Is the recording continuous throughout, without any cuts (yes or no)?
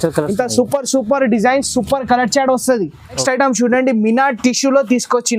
no